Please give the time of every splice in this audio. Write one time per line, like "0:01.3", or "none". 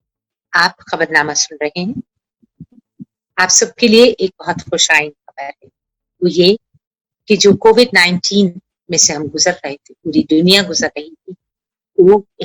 none

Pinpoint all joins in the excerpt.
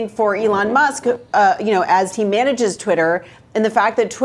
none

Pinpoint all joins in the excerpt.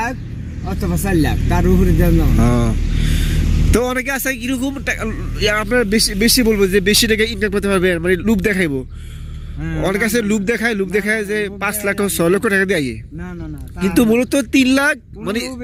none

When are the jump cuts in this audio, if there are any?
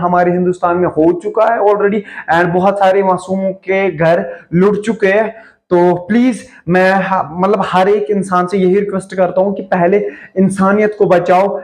none

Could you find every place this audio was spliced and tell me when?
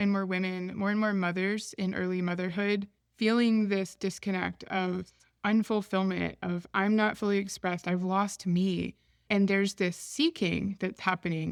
none

